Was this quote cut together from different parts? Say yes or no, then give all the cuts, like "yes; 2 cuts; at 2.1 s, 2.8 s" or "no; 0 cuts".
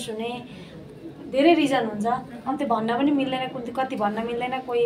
no; 0 cuts